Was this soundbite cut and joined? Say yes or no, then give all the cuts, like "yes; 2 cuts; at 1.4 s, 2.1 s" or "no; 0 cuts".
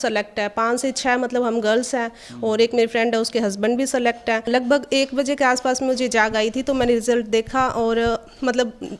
yes; 1 cut; at 4.5 s